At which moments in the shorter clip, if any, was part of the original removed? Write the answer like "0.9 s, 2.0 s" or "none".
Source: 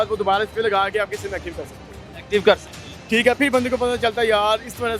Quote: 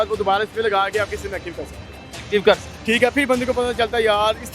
2.7 s